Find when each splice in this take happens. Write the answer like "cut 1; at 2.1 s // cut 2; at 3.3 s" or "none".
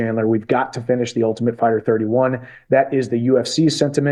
cut 1; at 2.9 s